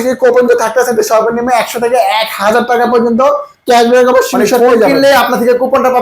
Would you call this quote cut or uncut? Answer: uncut